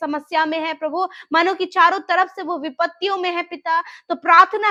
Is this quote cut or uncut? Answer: uncut